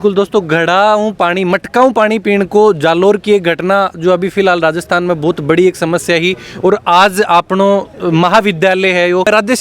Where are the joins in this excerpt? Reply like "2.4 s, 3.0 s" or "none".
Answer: none